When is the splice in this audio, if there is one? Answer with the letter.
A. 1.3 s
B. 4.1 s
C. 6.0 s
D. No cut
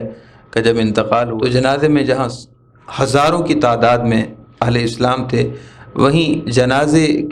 A